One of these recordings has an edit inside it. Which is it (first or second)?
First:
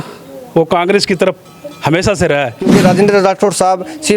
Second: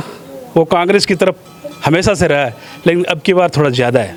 first